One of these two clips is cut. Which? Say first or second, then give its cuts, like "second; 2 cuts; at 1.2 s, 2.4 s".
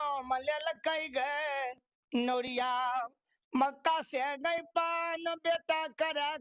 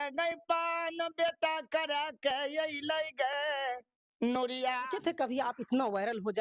second; 1 cut; at 4.9 s